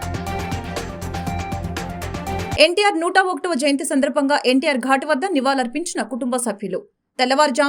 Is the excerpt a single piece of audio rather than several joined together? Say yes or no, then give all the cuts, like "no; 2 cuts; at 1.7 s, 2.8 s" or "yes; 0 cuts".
no; 1 cut; at 2.5 s